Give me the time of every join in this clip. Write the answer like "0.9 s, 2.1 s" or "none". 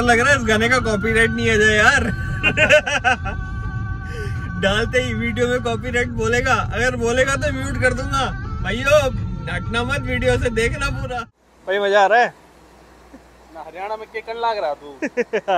11.1 s